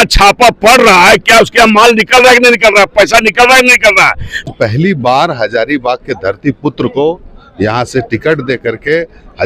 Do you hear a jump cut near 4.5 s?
yes; 1 cut; at 4.5 s

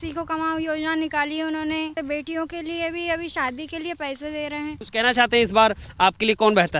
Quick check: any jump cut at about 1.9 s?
yes; 2 cuts; at 1.9 s, 4.8 s

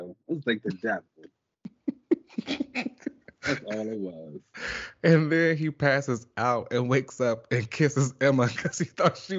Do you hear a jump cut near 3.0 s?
no; 0 cuts

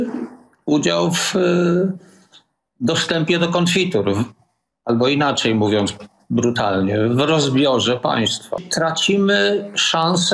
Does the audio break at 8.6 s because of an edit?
yes; 1 cut; at 8.6 s

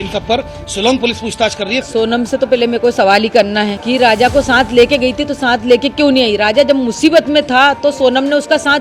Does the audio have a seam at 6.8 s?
no; 2 cuts; at 1.9 s, 3.8 s

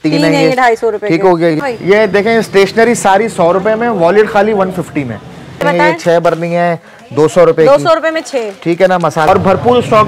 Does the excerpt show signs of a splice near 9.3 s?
yes; 3 cuts; at 1.6 s, 5.6 s, 9.3 s

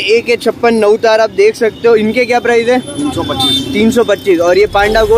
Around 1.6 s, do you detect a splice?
no; 0 cuts

